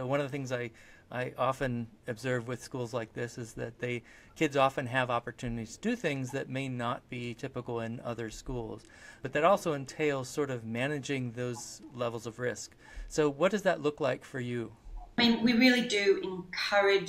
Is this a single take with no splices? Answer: no; 2 cuts; at 9.2 s, 15.2 s

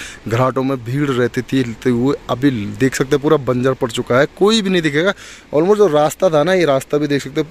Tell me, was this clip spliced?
no; 0 cuts

